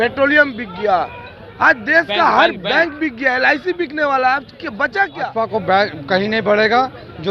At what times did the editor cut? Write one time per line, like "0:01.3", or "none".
0:05.2